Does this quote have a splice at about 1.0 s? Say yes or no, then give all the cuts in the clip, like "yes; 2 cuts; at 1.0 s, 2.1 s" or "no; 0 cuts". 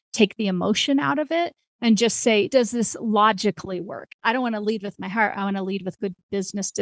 no; 2 cuts; at 2.5 s, 4.1 s